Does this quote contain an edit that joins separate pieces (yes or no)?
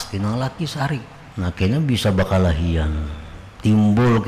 yes